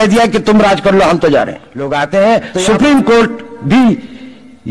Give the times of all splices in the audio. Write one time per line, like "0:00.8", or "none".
0:01.9